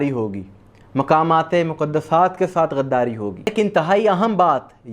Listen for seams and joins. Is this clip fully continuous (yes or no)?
no